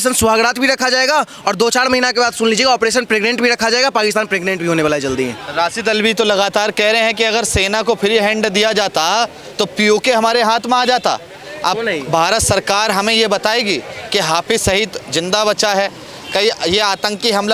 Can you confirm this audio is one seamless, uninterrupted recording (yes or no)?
yes